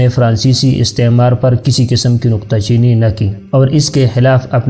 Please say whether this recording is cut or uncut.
uncut